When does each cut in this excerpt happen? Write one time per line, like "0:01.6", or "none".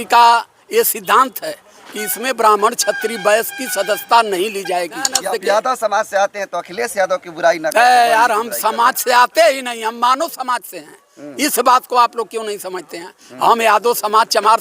0:05.2